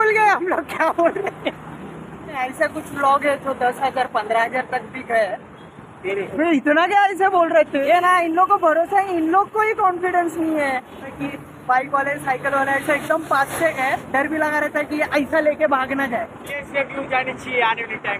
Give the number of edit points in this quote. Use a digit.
5